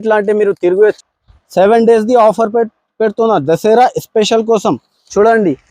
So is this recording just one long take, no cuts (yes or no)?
no